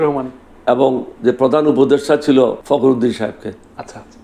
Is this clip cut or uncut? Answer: cut